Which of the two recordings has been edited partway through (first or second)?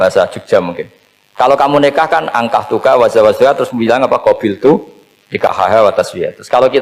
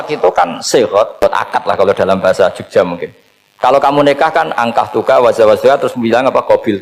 second